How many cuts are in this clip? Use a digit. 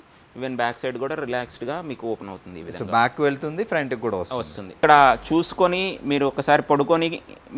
1